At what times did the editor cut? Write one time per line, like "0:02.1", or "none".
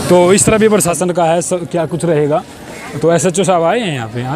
0:01.0